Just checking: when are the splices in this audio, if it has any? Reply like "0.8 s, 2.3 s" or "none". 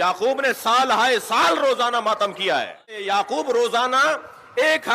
3.0 s